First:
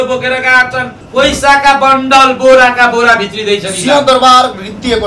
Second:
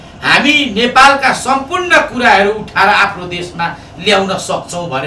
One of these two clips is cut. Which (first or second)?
first